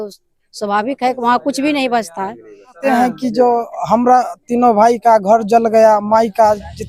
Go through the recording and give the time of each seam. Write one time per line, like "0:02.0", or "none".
0:02.8